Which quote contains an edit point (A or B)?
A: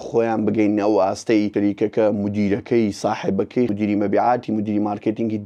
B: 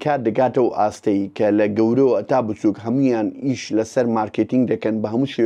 A